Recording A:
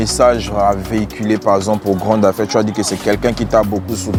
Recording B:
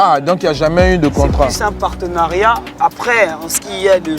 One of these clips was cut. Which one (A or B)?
B